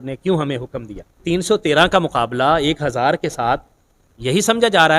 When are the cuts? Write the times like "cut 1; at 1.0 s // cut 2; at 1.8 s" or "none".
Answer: cut 1; at 1.2 s